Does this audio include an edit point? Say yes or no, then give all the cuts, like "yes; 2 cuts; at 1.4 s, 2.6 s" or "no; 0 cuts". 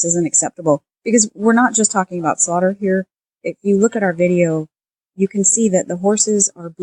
no; 0 cuts